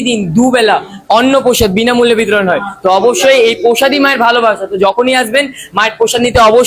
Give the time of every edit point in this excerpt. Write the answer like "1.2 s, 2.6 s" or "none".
none